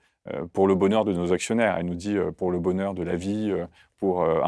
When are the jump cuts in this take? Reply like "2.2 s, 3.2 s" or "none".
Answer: 2.3 s